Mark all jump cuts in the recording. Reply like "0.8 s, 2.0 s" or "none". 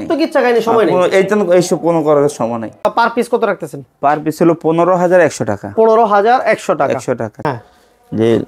2.8 s, 7.4 s